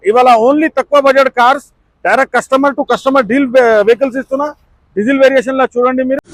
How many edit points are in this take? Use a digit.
0